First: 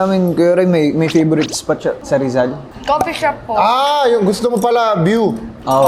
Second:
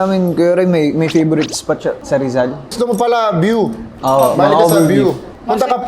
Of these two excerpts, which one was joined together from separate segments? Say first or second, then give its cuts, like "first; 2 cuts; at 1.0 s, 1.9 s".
second; 1 cut; at 2.7 s